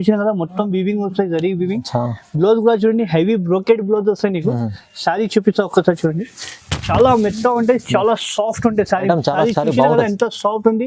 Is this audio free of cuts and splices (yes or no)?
yes